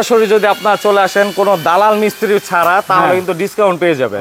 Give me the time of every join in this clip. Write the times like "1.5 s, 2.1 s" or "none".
none